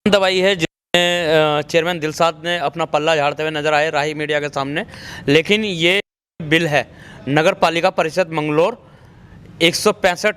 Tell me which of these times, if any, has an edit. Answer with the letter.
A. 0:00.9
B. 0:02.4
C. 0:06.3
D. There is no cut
D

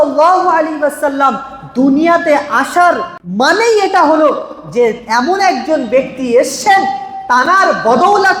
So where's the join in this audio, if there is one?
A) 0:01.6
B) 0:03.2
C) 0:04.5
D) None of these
B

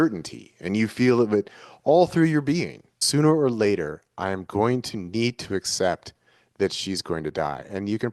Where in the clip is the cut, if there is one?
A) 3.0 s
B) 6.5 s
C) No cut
A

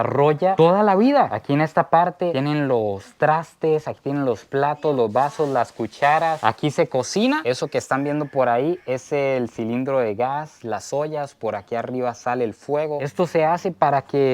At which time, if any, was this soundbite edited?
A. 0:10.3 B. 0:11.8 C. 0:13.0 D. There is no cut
C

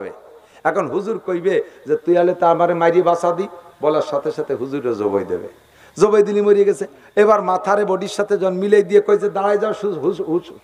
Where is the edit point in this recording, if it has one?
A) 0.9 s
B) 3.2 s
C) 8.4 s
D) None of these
D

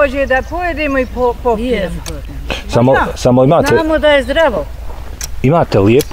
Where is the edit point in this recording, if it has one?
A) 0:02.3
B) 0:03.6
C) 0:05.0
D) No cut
D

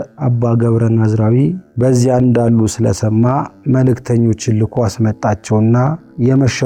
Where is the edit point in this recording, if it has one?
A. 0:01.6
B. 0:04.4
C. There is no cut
C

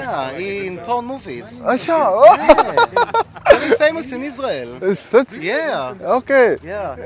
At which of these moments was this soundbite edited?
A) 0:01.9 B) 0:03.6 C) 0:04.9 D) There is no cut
D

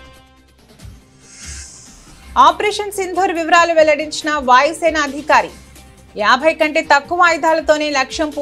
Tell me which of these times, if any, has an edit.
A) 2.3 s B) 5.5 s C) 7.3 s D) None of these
A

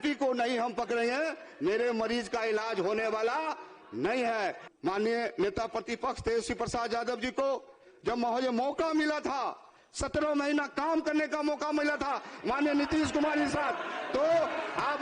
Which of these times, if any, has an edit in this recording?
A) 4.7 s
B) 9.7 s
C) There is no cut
A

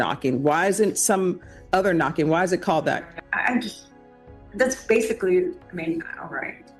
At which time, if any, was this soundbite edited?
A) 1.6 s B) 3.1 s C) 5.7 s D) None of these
B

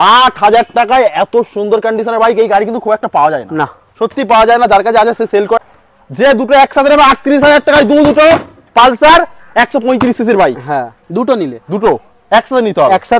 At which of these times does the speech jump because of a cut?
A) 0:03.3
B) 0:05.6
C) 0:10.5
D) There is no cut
B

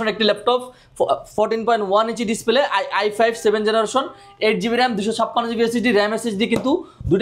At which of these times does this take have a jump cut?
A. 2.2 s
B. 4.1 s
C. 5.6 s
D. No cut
D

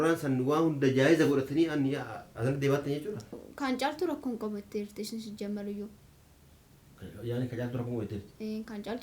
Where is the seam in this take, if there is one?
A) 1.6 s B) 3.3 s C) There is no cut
B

